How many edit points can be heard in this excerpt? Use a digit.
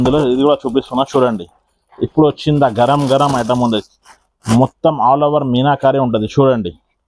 0